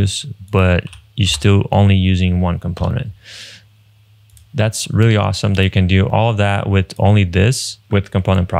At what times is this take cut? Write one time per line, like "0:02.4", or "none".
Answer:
0:06.1
0:07.7